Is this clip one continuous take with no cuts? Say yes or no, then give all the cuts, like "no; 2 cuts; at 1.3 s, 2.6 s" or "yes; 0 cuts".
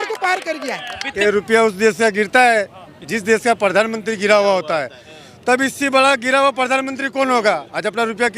no; 1 cut; at 1.0 s